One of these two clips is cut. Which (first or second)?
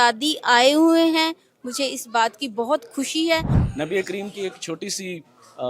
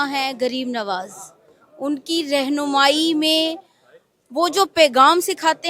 first